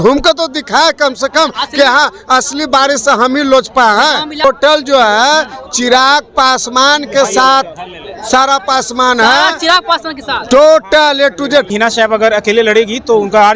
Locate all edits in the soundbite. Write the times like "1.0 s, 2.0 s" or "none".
4.4 s, 11.7 s

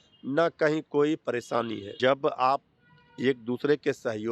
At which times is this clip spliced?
1.8 s

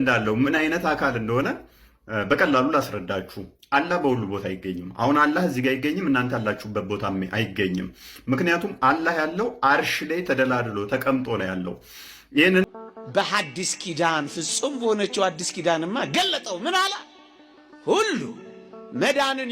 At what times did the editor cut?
12.7 s

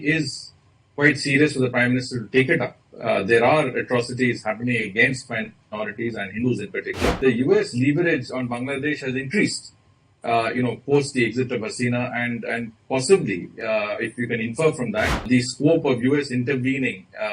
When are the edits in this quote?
7.2 s, 15.2 s

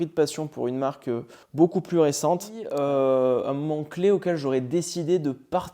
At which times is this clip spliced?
2.6 s

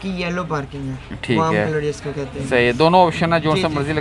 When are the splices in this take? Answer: none

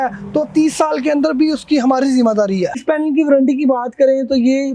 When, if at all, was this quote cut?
2.8 s

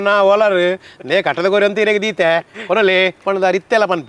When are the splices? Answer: none

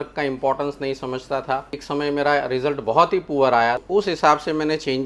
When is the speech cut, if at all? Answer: 1.8 s, 3.8 s

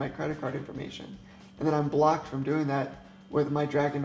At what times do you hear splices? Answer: none

